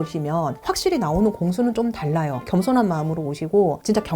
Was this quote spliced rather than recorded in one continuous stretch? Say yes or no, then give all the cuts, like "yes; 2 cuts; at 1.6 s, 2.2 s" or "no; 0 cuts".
yes; 1 cut; at 2.5 s